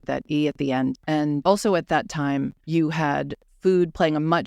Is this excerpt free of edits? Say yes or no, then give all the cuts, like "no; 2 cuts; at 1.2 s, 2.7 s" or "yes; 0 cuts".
no; 3 cuts; at 1.2 s, 2.6 s, 3.4 s